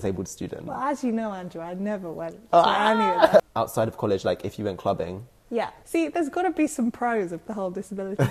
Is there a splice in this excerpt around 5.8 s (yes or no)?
yes